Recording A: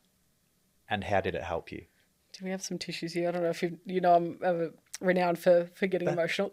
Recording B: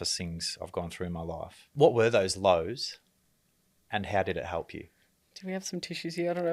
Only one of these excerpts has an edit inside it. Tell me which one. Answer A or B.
B